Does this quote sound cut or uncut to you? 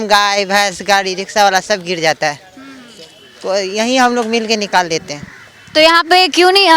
uncut